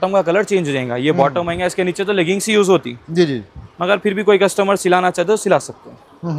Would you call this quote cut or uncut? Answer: uncut